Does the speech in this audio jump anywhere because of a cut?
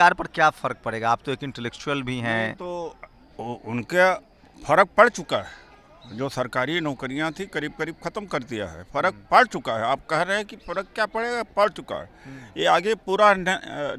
no; 0 cuts

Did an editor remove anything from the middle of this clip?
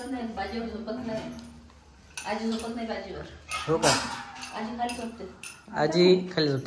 no; 0 cuts

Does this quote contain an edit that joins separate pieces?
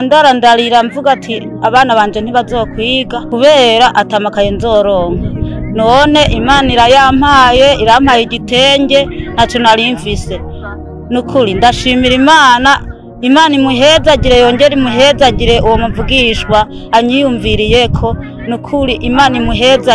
no; 0 cuts

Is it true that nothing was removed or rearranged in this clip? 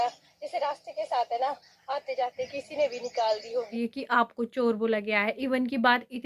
no; 1 cut; at 3.7 s

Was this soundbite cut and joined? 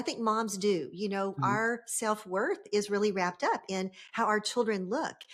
no; 0 cuts

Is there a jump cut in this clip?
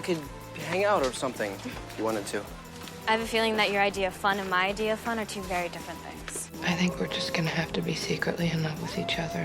yes; 1 cut; at 6.5 s

